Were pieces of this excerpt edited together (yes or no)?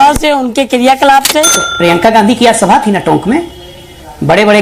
yes